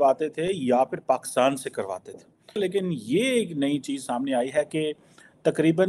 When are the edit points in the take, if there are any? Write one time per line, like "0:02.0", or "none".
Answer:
0:02.6